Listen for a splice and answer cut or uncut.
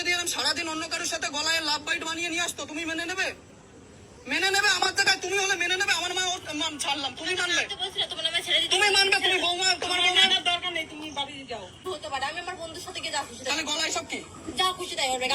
cut